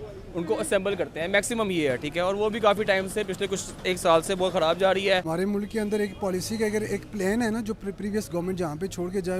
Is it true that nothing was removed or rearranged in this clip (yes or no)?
no